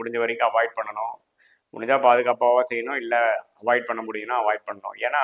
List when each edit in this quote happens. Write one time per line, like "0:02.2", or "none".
none